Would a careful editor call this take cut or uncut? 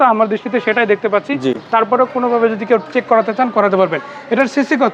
uncut